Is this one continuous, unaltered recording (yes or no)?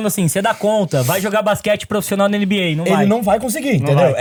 yes